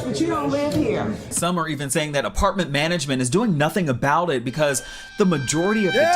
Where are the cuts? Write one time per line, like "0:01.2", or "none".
0:01.3